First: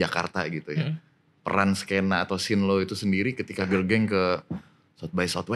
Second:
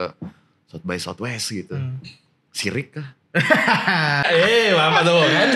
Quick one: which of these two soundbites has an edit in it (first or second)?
second